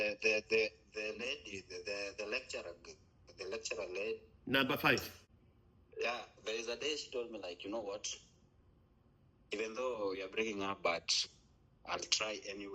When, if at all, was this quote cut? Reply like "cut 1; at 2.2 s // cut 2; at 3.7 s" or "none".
cut 1; at 5.2 s